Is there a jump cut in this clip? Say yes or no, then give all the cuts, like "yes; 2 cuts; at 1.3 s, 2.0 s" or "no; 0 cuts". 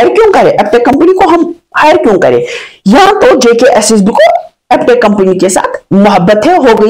no; 0 cuts